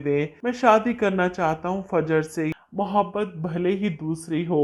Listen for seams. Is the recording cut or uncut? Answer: cut